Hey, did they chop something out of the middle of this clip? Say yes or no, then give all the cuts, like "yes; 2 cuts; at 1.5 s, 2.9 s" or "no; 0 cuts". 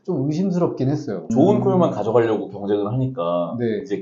yes; 1 cut; at 1.3 s